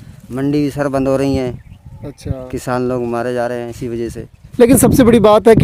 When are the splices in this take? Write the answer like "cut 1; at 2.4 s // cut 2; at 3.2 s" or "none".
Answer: cut 1; at 4.4 s